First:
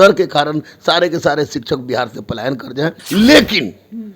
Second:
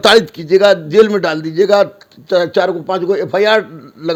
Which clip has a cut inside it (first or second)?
first